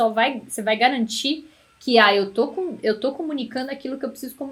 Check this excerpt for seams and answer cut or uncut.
uncut